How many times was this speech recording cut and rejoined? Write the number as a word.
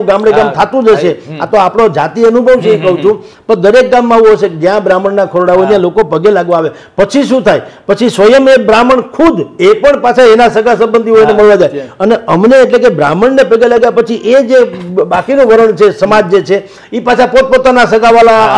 zero